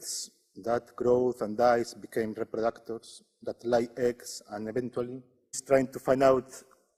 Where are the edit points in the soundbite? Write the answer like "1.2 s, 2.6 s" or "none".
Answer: none